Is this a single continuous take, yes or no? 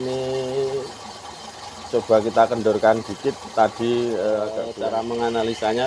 no